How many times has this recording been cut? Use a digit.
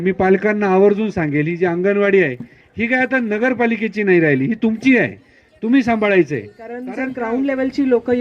1